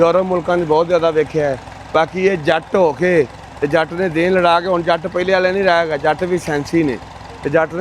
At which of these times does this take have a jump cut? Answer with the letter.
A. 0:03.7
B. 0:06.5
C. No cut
C